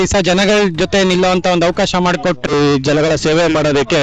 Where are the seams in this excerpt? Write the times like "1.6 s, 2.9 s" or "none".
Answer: 2.5 s